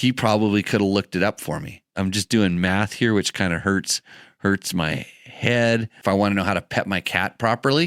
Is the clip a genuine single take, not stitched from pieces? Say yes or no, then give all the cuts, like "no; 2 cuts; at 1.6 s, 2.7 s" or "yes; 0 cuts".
no; 2 cuts; at 1.8 s, 6.0 s